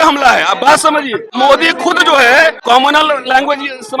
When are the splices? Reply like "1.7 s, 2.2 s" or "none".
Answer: 1.2 s, 2.6 s